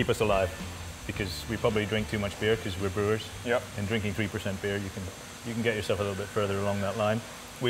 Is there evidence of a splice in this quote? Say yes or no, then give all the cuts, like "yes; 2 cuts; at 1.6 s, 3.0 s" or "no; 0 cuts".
no; 0 cuts